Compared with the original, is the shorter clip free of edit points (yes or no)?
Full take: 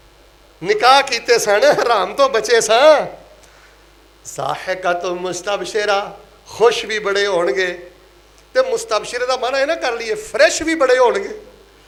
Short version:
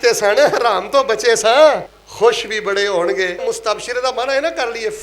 no